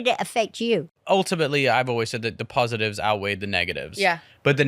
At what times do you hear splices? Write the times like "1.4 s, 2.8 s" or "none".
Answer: 0.9 s